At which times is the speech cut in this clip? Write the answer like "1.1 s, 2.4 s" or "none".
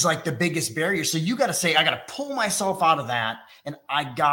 none